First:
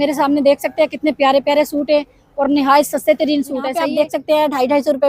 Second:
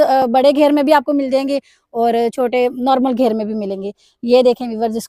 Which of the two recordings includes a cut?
first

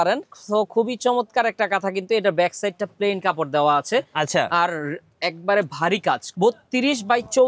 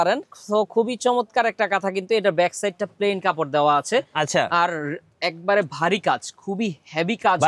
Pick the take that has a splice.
first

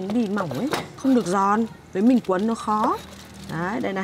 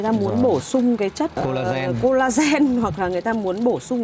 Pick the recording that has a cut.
first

